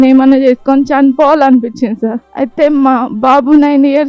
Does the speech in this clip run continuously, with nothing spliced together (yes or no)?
no